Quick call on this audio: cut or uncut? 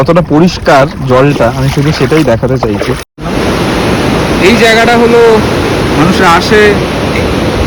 cut